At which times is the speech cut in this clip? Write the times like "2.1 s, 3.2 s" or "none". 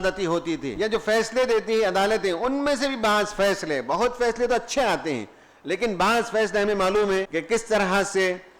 0.9 s, 7.3 s